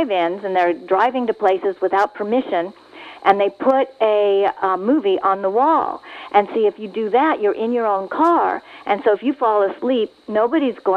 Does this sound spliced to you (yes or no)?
no